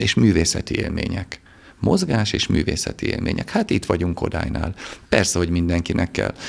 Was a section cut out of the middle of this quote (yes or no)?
no